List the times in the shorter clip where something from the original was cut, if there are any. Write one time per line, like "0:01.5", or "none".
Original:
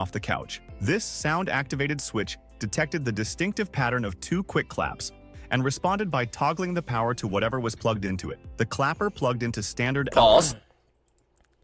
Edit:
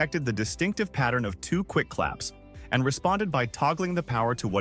none